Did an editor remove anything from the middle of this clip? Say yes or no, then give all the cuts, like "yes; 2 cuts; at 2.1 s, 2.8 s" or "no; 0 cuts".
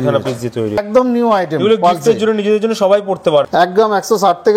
yes; 2 cuts; at 0.8 s, 3.5 s